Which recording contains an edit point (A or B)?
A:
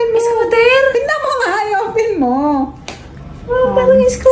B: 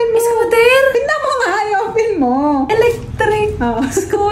B